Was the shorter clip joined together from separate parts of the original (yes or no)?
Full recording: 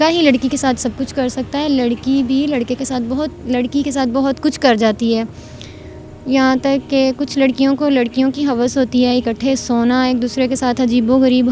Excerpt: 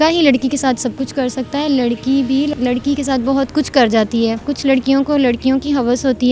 yes